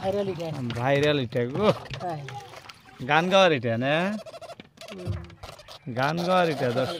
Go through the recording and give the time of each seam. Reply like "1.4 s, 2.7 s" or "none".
none